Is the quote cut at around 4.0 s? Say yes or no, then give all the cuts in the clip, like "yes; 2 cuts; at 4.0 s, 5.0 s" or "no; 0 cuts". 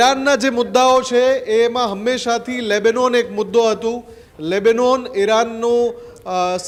no; 0 cuts